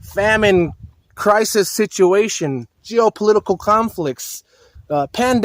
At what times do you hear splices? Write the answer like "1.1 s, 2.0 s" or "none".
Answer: none